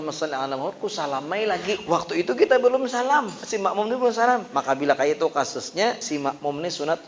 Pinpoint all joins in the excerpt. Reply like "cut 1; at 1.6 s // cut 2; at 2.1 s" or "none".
cut 1; at 1.8 s // cut 2; at 3.4 s // cut 3; at 4.5 s // cut 4; at 6.0 s